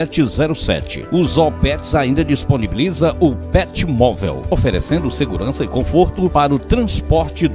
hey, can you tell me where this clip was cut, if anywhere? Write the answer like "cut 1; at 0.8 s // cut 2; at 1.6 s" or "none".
none